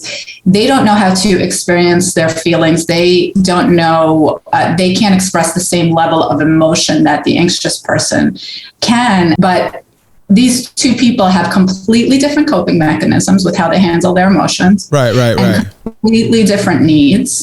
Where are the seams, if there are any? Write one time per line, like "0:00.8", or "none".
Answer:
0:09.4